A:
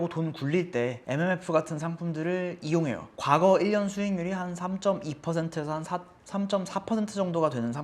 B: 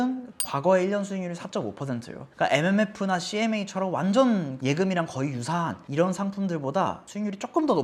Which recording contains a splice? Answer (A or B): A